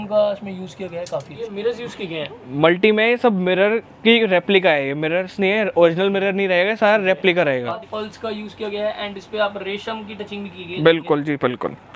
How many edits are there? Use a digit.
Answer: 2